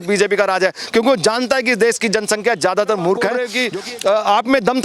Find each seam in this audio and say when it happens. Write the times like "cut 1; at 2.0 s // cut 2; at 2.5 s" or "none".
cut 1; at 3.5 s